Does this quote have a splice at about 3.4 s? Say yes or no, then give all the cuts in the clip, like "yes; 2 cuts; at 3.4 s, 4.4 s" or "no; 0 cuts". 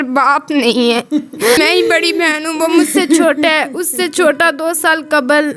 no; 1 cut; at 1.6 s